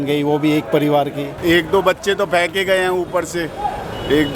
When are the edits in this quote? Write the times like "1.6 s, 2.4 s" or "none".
1.3 s

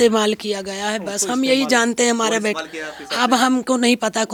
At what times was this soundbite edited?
none

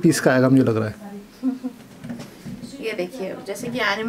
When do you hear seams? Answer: none

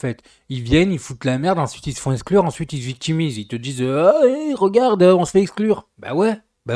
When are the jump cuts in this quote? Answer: none

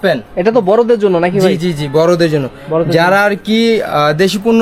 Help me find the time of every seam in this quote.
none

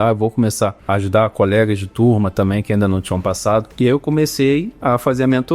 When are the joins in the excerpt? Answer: 1.3 s, 3.7 s

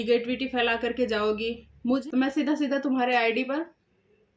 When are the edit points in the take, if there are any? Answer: 2.0 s

